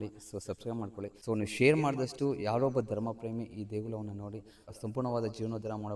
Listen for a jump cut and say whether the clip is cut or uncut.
cut